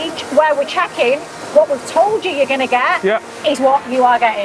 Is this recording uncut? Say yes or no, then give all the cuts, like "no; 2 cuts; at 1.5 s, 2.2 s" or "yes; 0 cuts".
yes; 0 cuts